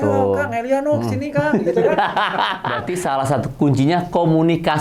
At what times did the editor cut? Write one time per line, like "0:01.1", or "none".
0:02.8